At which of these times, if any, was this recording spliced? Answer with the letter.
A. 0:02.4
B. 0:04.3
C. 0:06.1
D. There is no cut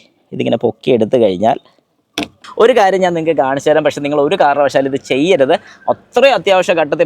A